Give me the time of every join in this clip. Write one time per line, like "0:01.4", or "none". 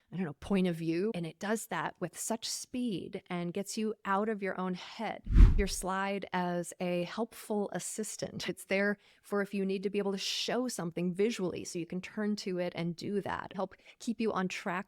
0:01.1
0:05.6
0:08.5
0:13.5